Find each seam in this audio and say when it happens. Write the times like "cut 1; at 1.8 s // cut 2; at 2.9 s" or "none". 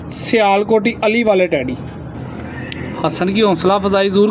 cut 1; at 2.2 s